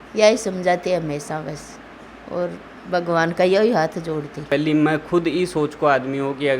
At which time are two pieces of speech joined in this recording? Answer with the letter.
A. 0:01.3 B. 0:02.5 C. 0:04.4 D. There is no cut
C